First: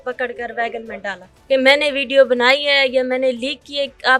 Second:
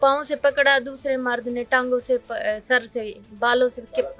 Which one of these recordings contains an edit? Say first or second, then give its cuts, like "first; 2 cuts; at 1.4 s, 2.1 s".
first; 1 cut; at 1.3 s